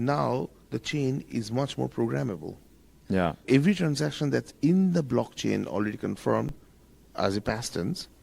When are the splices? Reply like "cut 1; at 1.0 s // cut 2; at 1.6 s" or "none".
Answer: cut 1; at 3.4 s